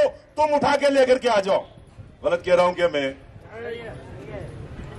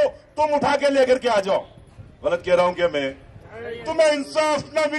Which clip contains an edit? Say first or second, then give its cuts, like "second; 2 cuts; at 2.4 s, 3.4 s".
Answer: second; 1 cut; at 3.8 s